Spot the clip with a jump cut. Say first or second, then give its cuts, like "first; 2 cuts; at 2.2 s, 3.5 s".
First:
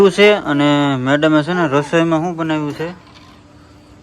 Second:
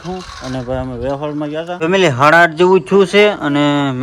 second; 1 cut; at 1.8 s